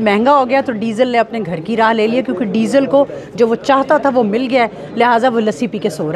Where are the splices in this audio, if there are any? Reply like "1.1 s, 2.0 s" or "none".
none